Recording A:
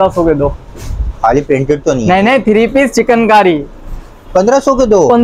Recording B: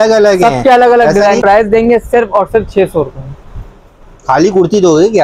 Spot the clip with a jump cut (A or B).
B